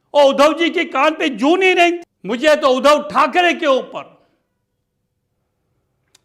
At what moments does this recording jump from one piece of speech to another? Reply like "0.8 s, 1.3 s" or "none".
2.1 s